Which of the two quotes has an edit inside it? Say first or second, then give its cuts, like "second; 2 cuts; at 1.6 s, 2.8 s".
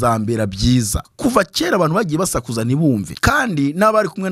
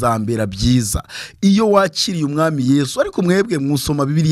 first; 2 cuts; at 1.0 s, 3.1 s